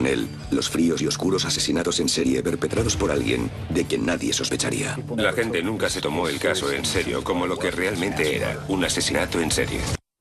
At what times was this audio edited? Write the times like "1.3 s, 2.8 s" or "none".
none